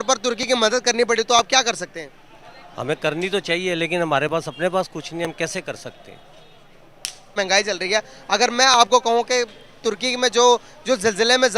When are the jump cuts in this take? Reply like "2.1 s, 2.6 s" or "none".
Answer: 7.3 s